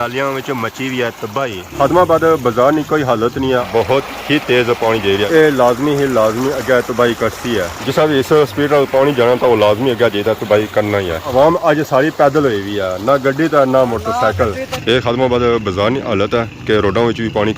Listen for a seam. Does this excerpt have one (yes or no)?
yes